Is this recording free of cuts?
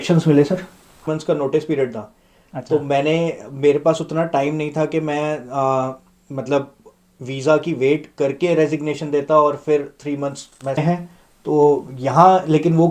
no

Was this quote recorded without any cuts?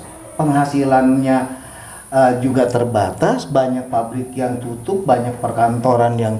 yes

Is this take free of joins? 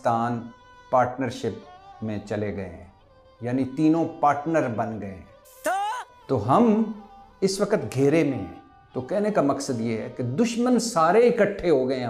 yes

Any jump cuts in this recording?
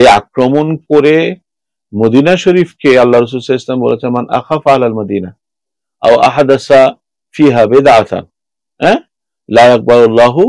no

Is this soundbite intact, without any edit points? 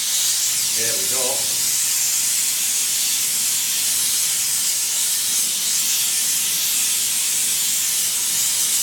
yes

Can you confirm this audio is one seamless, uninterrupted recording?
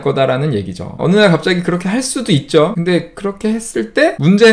no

